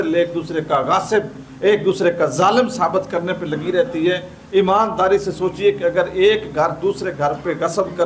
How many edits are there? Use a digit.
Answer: 0